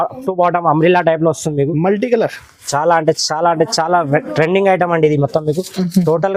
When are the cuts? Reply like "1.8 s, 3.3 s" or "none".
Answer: none